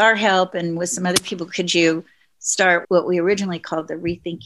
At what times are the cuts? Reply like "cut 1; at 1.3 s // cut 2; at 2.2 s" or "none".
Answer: cut 1; at 2.8 s